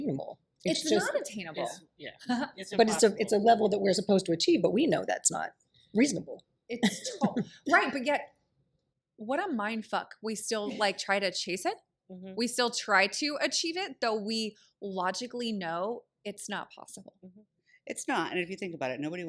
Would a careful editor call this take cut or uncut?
uncut